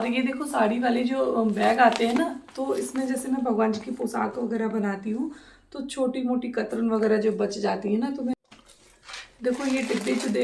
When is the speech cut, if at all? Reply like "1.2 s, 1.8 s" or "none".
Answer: 8.3 s